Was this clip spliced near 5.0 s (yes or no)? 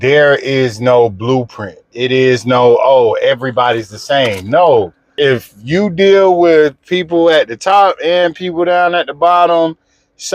yes